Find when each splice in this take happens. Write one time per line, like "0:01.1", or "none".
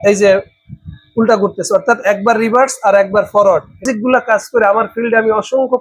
0:03.8